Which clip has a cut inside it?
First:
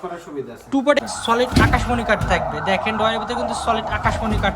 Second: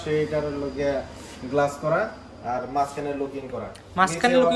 first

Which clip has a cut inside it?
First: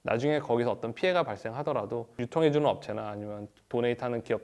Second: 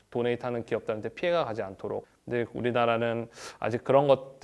second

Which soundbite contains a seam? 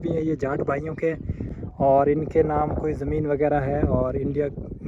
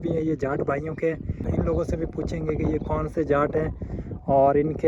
first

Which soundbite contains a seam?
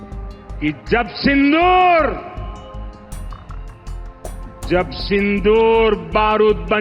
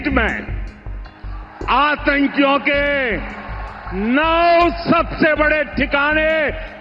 first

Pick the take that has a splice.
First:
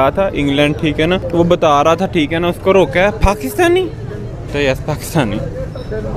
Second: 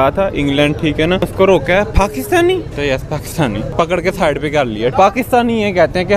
second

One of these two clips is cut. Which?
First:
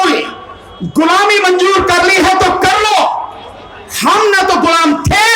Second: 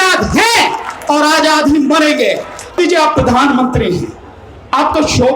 second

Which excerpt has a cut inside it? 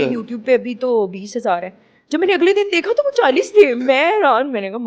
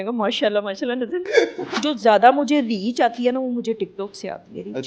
second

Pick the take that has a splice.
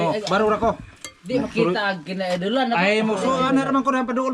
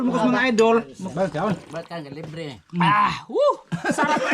second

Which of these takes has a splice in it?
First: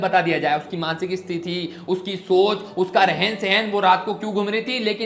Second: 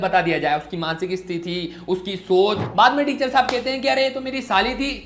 second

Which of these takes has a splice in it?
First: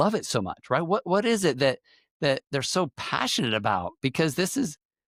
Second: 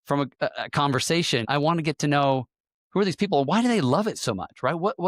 second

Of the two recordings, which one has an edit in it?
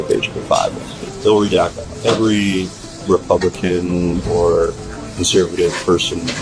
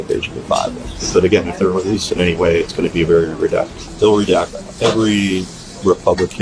first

